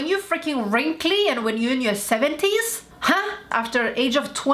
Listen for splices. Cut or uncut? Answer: cut